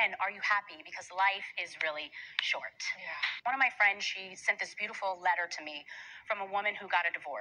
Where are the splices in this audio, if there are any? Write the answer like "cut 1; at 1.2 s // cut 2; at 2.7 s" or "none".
cut 1; at 3.3 s // cut 2; at 3.9 s